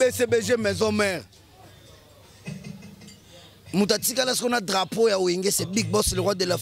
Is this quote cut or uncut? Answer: uncut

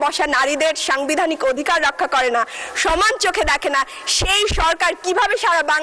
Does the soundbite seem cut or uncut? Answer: uncut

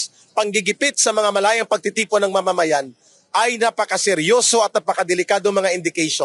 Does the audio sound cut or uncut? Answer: uncut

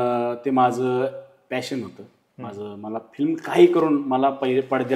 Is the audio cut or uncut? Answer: uncut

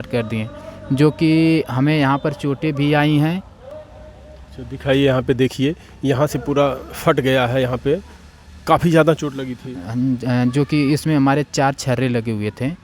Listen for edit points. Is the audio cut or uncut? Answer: uncut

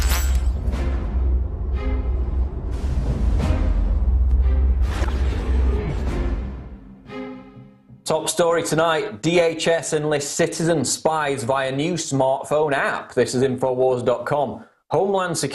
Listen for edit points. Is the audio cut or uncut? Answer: cut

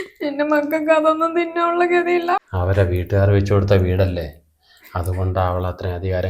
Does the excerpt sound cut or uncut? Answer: cut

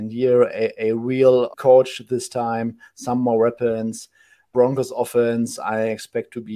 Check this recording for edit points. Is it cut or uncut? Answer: cut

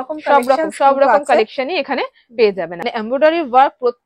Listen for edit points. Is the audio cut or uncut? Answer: cut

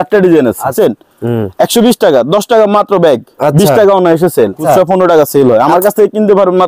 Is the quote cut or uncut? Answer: cut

